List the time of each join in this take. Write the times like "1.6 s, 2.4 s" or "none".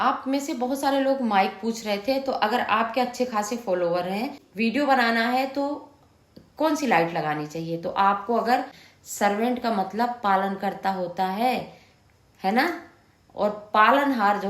4.4 s, 8.7 s